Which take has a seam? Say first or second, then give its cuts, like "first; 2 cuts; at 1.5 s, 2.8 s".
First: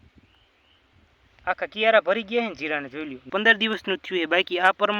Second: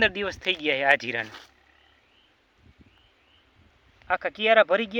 first; 1 cut; at 3.3 s